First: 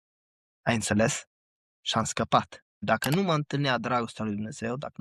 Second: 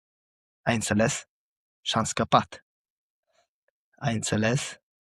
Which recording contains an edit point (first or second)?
first